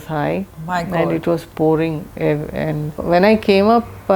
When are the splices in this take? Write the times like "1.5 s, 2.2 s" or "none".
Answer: 3.0 s